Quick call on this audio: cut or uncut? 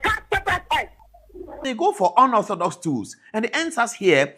cut